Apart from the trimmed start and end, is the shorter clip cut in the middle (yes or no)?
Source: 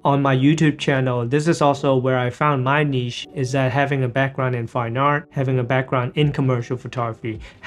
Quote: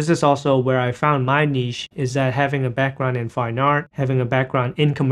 no